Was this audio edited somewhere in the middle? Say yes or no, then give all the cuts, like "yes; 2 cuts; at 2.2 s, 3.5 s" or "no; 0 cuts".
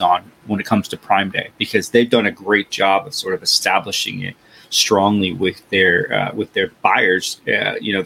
no; 0 cuts